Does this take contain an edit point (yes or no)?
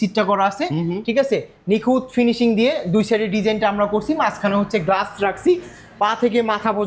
no